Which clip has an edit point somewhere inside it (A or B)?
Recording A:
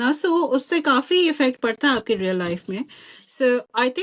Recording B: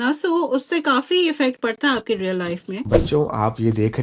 B